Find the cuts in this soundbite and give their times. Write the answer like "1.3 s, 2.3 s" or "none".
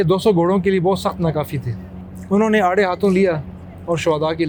none